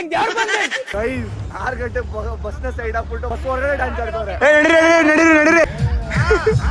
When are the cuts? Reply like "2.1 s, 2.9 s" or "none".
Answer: 0.9 s, 4.3 s, 5.6 s

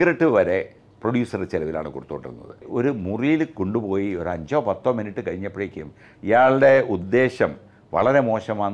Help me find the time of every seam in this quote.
2.6 s

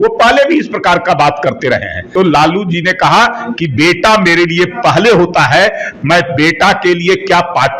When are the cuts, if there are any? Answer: 2.0 s

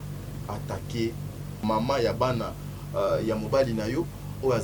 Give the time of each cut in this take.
1.6 s

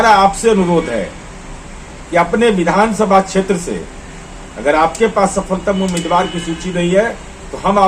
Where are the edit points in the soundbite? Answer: none

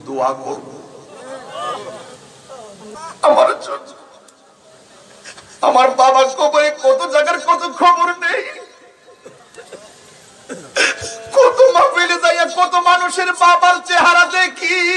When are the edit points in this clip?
2.9 s

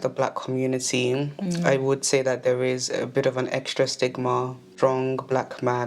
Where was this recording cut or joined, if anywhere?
4.7 s

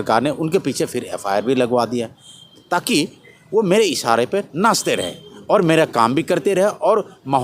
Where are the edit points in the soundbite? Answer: none

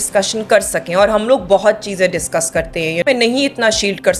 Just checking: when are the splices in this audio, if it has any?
3.0 s

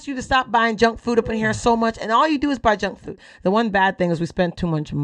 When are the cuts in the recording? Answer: 3.2 s

